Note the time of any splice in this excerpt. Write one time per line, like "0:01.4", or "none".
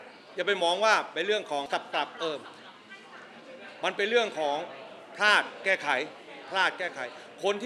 0:01.7